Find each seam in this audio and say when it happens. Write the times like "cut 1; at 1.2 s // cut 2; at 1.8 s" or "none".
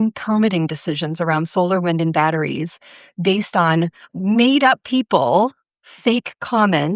cut 1; at 4.1 s